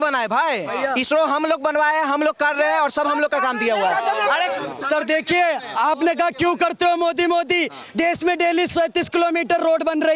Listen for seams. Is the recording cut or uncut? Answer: cut